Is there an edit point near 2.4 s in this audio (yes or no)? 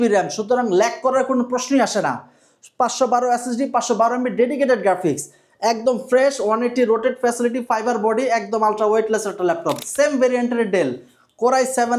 no